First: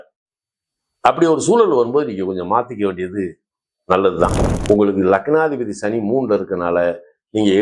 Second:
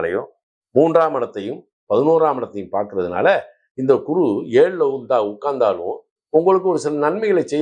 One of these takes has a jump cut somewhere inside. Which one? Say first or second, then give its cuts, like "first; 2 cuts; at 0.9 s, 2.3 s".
first; 1 cut; at 4.5 s